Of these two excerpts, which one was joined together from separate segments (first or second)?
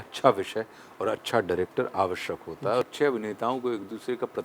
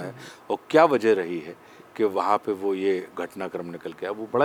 first